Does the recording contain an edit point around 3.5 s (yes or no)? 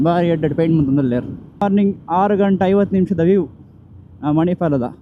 no